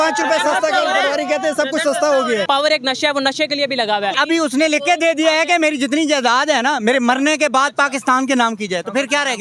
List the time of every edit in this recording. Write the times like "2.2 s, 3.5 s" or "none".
2.4 s, 4.2 s